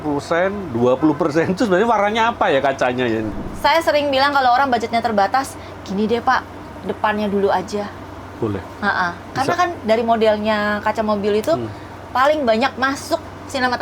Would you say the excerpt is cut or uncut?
cut